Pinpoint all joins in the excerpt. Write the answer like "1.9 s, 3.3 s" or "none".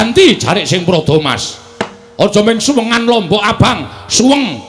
none